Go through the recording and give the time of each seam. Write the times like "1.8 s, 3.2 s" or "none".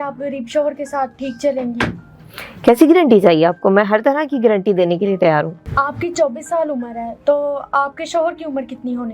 5.6 s